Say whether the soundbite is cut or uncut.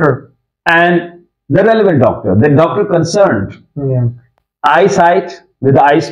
uncut